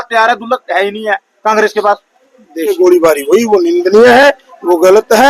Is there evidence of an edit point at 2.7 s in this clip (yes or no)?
yes